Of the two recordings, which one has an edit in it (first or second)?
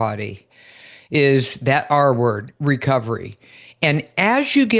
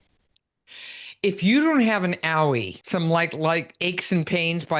second